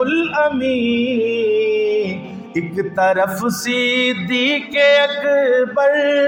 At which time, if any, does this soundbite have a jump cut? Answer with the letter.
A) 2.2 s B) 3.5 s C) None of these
C